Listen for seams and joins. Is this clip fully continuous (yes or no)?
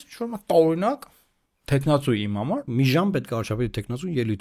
no